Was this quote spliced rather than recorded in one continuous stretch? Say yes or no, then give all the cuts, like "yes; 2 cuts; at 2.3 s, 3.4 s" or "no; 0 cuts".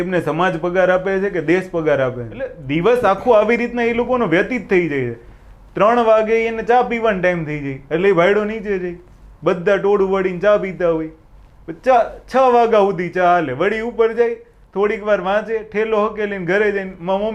yes; 1 cut; at 2.6 s